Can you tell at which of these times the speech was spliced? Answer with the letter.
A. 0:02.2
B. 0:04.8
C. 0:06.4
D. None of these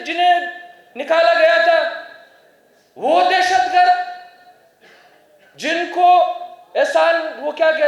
D